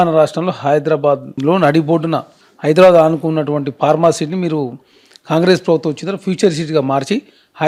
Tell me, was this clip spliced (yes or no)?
no